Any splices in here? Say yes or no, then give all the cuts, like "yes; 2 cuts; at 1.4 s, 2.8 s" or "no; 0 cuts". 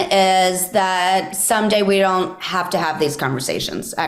no; 0 cuts